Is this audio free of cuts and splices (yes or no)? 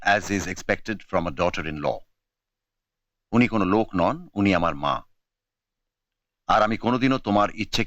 yes